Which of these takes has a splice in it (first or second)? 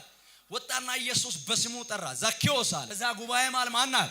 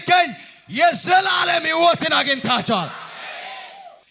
first